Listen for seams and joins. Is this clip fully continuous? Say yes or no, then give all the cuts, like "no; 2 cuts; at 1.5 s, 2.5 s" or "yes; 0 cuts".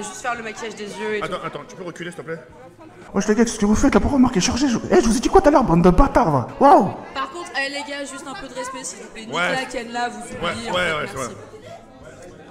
yes; 0 cuts